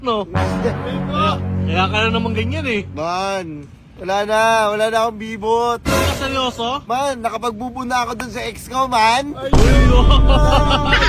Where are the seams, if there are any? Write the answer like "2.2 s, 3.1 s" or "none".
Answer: none